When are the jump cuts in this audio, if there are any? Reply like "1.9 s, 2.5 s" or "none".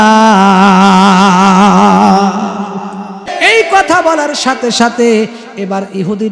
3.3 s